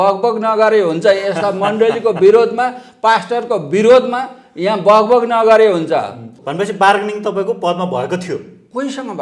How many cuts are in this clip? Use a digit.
1